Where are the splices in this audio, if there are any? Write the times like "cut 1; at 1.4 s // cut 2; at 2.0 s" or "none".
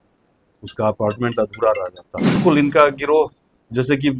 cut 1; at 2.4 s